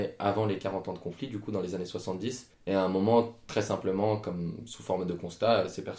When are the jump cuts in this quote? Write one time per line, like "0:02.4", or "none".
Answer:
0:02.5